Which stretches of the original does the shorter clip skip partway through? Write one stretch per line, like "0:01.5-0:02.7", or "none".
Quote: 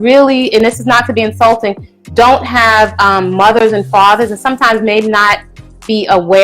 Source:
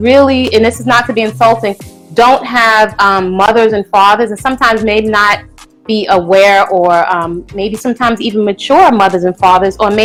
none